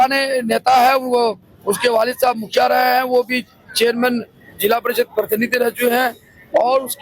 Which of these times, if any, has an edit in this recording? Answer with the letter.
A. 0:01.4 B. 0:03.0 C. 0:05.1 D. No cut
D